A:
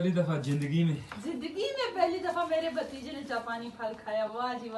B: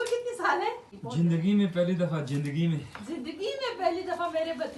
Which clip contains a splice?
B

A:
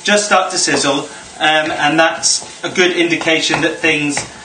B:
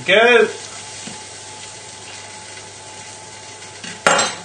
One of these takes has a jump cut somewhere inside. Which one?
A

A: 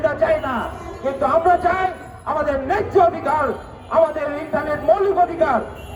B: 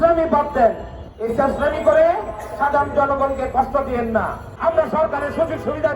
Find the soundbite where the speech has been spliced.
B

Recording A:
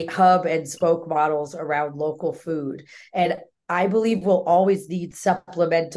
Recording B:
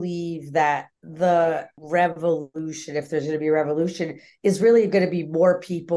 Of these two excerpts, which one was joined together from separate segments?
B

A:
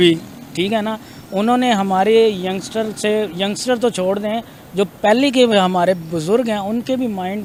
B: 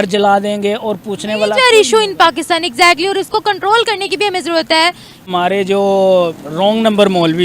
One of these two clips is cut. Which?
B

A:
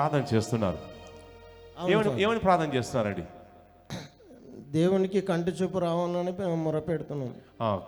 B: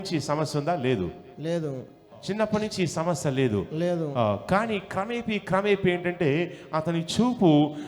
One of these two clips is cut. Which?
B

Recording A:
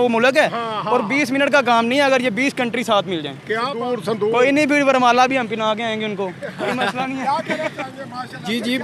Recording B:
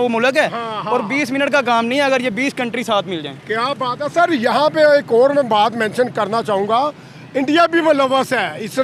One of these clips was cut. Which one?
A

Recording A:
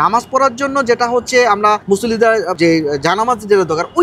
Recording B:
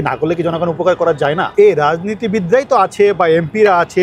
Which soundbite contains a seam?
B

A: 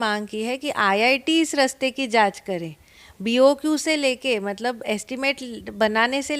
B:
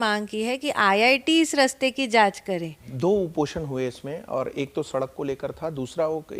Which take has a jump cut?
B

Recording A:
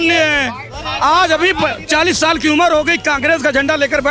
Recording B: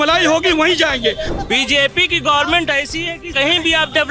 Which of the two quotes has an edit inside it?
B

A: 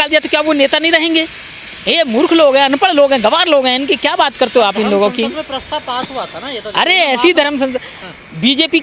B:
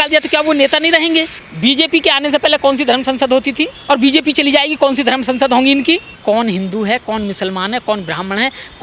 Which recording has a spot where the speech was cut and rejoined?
B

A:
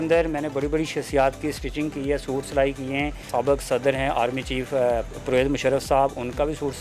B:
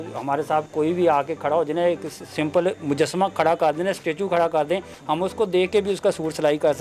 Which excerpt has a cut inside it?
A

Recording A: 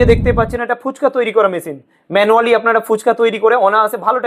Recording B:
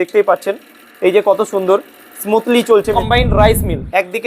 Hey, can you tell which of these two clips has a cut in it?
B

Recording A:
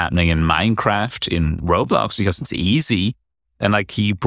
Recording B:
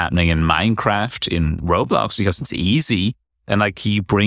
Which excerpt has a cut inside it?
B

